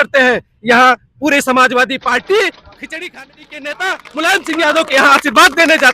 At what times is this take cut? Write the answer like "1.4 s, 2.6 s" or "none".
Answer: 3.2 s